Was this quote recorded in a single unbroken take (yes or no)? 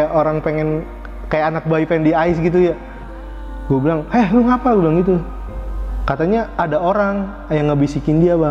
yes